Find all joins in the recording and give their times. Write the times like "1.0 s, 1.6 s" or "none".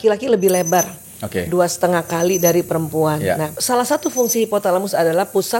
3.5 s